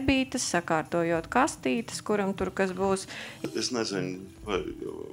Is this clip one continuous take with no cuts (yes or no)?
no